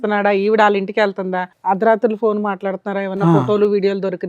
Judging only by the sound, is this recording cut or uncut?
cut